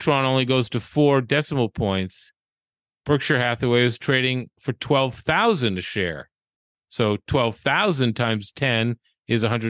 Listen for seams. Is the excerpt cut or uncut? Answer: cut